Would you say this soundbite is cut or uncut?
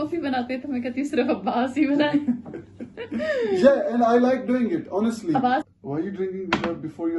cut